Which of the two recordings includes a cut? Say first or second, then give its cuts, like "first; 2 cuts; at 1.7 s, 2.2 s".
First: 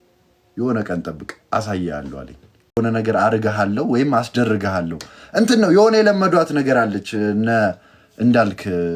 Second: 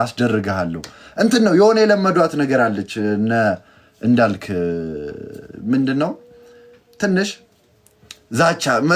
first; 1 cut; at 2.8 s